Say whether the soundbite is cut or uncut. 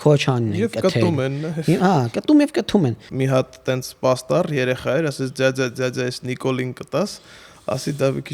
cut